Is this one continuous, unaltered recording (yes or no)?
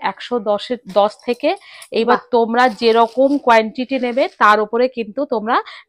yes